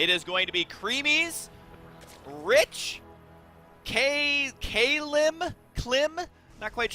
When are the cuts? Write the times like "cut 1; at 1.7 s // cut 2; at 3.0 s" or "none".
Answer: none